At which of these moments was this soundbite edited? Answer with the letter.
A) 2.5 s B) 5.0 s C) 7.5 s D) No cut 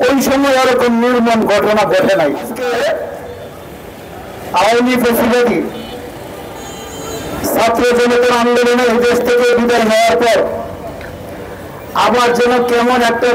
A